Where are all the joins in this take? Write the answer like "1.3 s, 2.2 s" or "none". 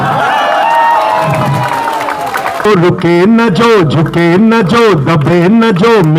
2.6 s